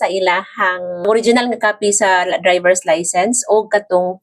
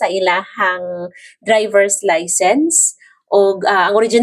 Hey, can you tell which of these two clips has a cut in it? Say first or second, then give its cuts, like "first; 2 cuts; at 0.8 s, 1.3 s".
first; 1 cut; at 1.0 s